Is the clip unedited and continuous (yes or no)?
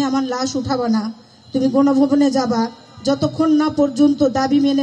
yes